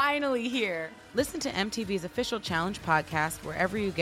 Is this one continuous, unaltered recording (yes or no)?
no